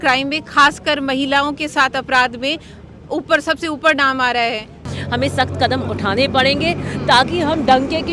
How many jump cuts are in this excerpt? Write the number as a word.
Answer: one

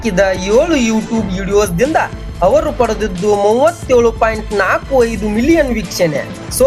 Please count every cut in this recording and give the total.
zero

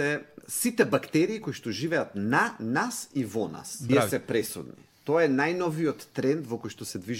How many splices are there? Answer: one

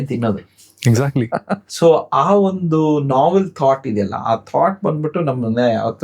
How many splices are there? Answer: one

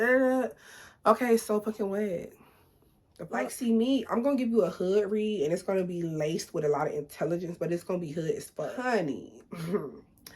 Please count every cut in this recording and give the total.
two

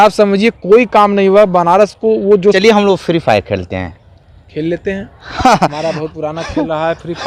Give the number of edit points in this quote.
one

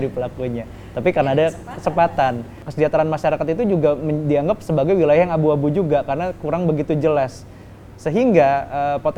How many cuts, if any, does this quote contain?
one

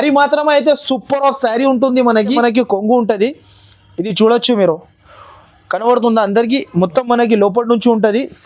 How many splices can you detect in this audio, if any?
one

